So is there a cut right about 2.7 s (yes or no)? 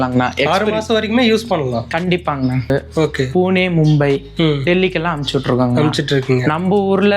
yes